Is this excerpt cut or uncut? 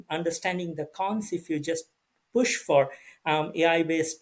uncut